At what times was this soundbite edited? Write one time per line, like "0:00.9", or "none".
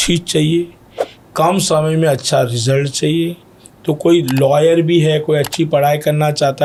none